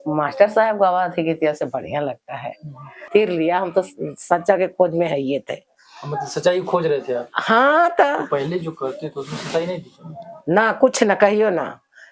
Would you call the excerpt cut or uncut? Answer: cut